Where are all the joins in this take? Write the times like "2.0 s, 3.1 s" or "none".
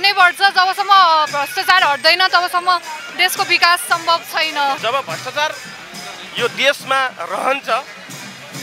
4.8 s